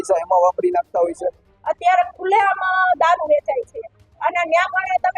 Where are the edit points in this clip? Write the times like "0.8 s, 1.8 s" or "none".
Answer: 1.5 s